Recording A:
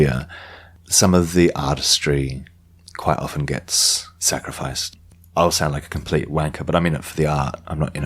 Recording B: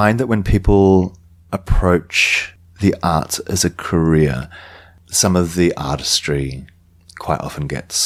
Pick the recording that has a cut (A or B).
A